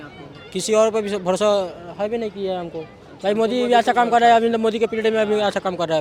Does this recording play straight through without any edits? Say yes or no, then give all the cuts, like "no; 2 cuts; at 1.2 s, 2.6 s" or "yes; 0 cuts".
yes; 0 cuts